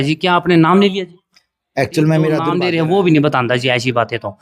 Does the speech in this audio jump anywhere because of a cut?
yes; 1 cut; at 2.5 s

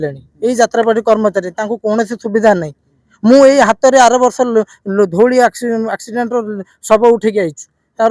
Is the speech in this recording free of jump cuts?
yes; 0 cuts

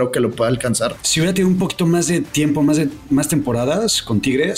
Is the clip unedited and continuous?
no; 1 cut; at 1.0 s

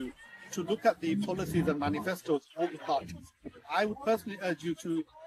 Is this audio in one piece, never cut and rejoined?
yes; 0 cuts

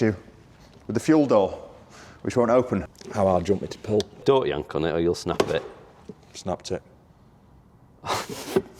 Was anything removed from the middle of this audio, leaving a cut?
yes; 2 cuts; at 2.9 s, 4.2 s

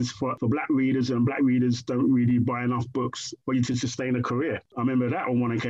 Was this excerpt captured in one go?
yes; 0 cuts

